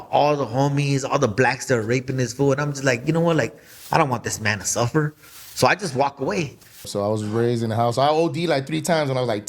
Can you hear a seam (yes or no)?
yes